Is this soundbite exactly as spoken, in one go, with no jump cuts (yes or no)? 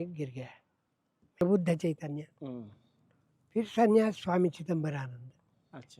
no